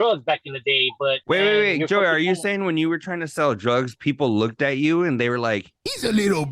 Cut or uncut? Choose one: cut